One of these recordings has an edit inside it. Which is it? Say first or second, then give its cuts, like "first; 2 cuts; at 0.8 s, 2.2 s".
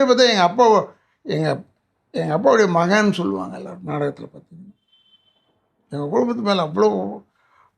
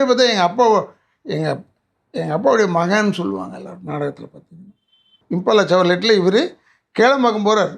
second; 1 cut; at 5.2 s